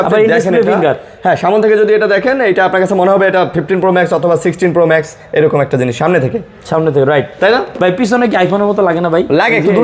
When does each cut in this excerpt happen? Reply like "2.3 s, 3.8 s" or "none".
none